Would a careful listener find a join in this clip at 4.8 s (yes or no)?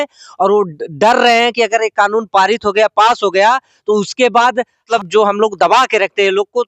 yes